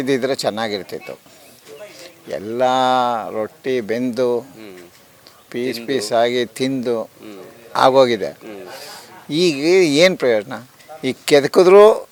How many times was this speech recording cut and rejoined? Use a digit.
0